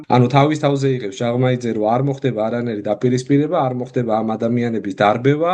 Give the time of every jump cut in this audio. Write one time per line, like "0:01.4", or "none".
none